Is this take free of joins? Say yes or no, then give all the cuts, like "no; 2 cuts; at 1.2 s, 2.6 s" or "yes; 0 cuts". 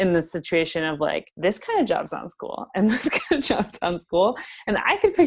no; 1 cut; at 1.3 s